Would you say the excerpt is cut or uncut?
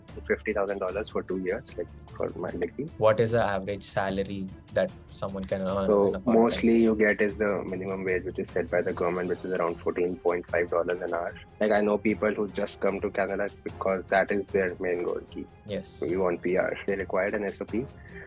cut